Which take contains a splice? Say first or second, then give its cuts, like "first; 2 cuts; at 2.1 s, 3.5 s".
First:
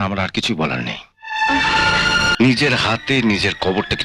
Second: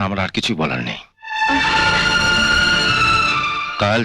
first; 1 cut; at 2.3 s